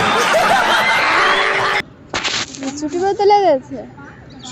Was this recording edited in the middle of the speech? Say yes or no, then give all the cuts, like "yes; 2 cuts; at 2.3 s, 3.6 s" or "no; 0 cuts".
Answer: no; 0 cuts